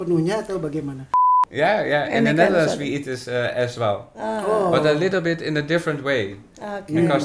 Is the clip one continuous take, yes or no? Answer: no